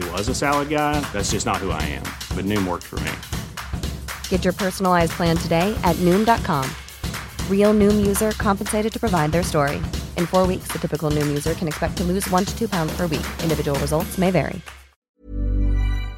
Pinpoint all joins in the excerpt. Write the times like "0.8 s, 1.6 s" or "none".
15.0 s